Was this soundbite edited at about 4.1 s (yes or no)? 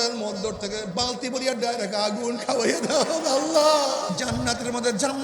yes